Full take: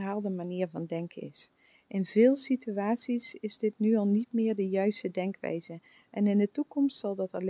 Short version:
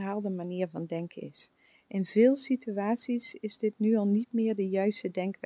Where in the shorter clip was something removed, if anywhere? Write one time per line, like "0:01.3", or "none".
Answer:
none